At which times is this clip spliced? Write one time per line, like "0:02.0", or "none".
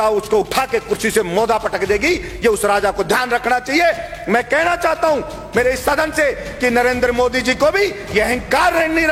none